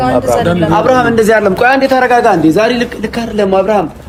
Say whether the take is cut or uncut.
uncut